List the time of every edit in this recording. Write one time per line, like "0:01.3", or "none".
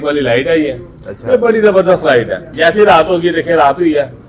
0:02.5